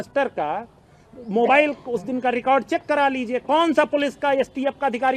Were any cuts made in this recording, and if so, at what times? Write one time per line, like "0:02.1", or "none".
none